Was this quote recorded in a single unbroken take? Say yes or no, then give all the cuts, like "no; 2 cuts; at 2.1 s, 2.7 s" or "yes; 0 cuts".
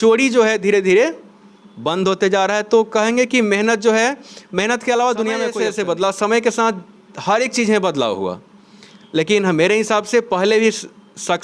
no; 1 cut; at 5.5 s